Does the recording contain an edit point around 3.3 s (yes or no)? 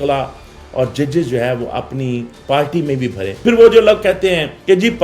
yes